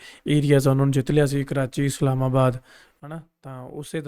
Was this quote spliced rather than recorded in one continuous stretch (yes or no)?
no